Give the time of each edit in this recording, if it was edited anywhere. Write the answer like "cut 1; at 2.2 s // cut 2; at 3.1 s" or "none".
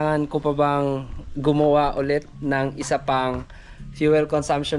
none